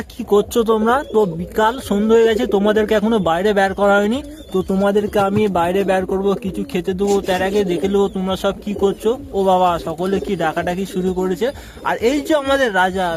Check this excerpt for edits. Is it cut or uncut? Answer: uncut